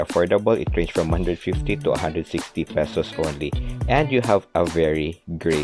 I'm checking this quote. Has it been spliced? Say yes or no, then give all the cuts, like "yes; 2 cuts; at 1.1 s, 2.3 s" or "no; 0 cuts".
no; 0 cuts